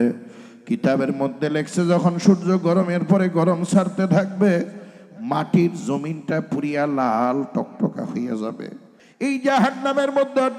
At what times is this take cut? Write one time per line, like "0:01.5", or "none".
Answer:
0:09.0